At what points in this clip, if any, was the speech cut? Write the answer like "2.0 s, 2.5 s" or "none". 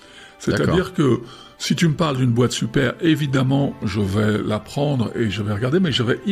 none